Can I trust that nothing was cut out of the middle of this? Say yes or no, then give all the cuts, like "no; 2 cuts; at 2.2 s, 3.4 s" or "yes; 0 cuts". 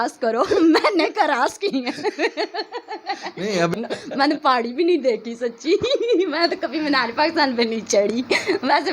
no; 1 cut; at 3.7 s